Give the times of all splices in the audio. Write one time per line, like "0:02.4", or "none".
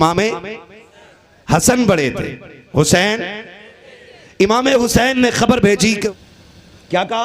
0:06.1